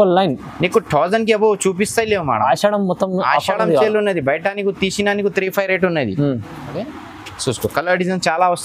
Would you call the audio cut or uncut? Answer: cut